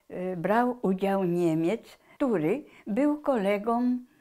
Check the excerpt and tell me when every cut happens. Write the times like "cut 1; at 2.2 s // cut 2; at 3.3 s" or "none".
cut 1; at 2.1 s

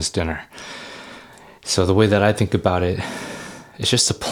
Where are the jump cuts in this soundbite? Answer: none

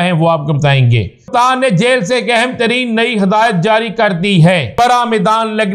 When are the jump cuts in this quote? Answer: cut 1; at 1.3 s // cut 2; at 4.7 s

